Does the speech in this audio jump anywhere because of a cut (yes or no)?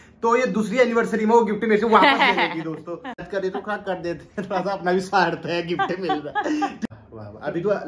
yes